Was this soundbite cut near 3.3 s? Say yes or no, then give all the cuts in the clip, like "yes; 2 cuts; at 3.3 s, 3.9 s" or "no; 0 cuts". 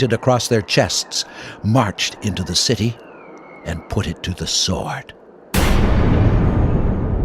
no; 1 cut; at 5.4 s